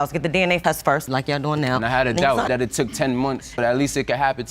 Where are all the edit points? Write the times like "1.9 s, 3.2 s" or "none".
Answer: 1.0 s, 2.5 s